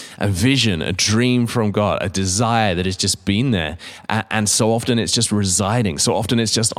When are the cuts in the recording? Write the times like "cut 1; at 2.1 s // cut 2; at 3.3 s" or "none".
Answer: none